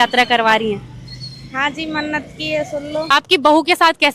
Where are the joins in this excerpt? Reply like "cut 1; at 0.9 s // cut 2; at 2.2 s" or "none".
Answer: cut 1; at 3.1 s